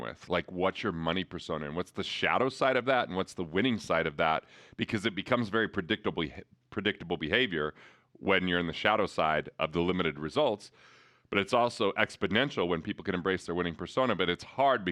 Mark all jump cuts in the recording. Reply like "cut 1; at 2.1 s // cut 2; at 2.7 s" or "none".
none